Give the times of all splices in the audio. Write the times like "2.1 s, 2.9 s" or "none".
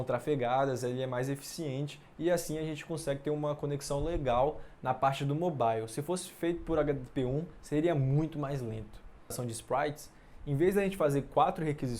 9.3 s